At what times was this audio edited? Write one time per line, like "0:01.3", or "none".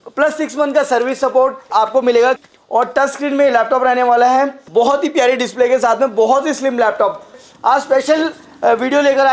0:01.6
0:02.4
0:04.6
0:07.4